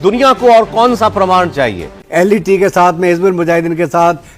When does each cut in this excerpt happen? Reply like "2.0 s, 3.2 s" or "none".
2.0 s